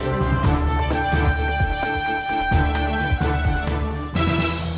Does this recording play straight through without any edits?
yes; 0 cuts

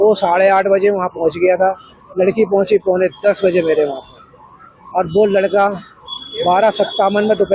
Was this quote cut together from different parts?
no; 0 cuts

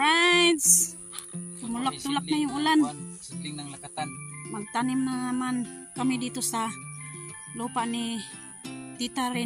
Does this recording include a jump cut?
no; 0 cuts

